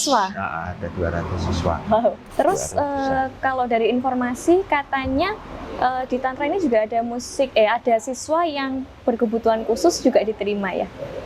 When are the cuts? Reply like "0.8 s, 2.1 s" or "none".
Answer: 2.2 s